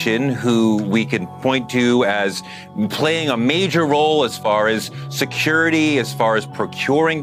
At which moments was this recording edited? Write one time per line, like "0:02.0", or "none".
none